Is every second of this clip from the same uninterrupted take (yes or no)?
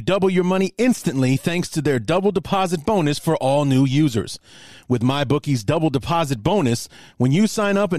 yes